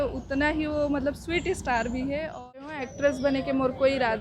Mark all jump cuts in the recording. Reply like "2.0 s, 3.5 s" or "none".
2.7 s